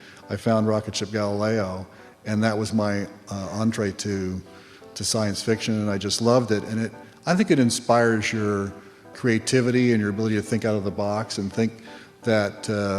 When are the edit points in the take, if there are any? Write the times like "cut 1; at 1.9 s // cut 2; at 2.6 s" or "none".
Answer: cut 1; at 9.1 s